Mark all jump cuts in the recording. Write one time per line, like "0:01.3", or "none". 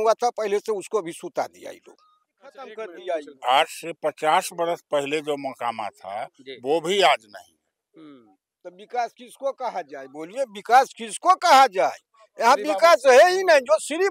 0:02.7